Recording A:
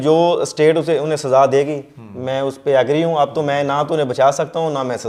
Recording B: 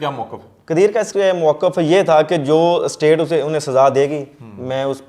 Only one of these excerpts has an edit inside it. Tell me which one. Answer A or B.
B